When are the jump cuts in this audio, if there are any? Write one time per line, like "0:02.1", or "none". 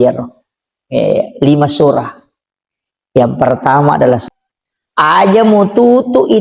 0:04.2

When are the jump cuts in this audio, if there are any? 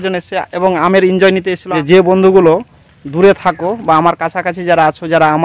0:01.6

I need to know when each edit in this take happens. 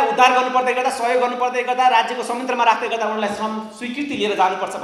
none

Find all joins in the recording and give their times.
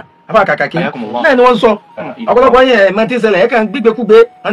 0:01.7

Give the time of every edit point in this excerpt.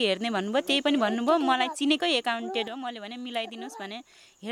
none

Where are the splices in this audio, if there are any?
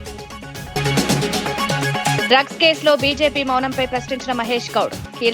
0:00.7
0:02.2

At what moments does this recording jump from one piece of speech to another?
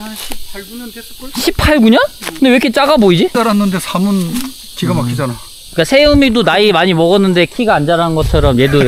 0:03.3

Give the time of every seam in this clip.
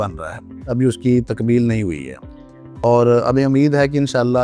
none

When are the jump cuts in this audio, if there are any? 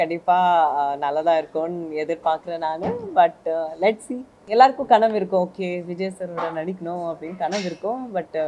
0:04.4

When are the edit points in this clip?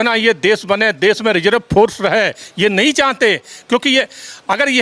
none

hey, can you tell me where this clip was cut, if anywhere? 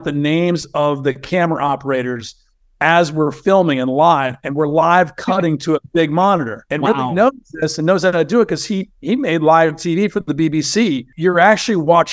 0:11.1

